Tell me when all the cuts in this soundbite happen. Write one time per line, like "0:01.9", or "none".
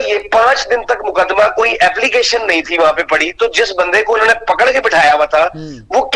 none